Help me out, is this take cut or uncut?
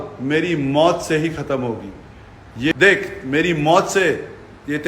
cut